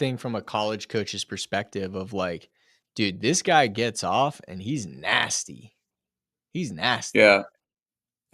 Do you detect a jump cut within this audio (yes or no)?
no